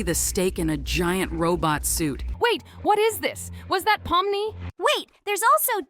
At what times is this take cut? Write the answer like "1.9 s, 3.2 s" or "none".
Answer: 2.3 s, 4.6 s